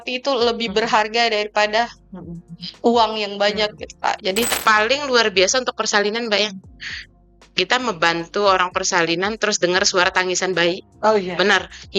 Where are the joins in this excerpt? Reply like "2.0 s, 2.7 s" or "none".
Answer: 4.5 s